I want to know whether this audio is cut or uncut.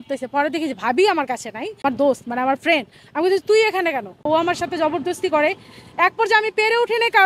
cut